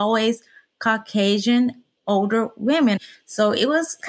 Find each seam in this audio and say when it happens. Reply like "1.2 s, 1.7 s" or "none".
1.9 s, 3.0 s